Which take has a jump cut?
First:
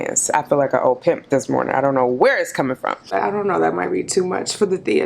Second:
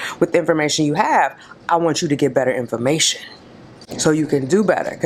first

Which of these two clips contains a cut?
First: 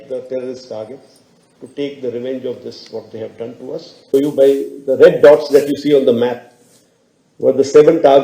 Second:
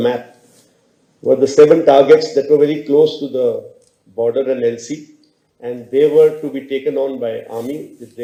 first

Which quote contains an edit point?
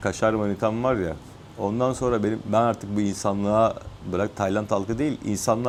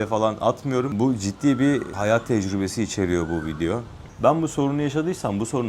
second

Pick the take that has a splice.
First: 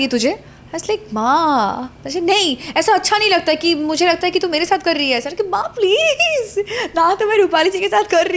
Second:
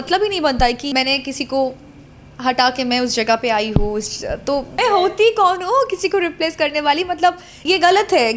second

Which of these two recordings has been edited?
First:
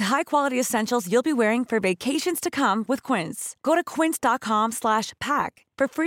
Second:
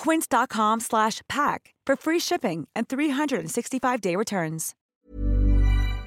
second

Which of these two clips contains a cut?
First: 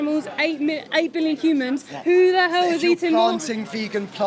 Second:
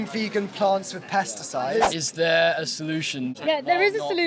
second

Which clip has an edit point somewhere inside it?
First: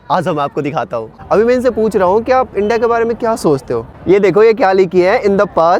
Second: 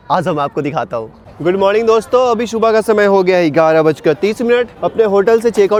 first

